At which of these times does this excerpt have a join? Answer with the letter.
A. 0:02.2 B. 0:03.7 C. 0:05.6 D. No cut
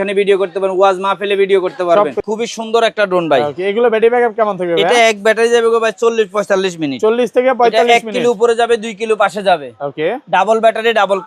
A